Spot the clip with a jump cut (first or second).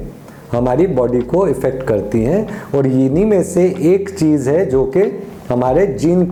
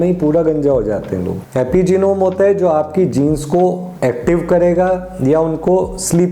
second